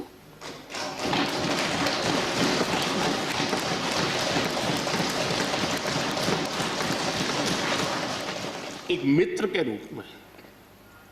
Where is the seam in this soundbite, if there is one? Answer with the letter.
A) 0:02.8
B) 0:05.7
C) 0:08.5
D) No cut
C